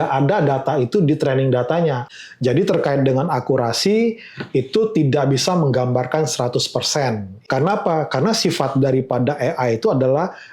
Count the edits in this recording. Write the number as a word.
two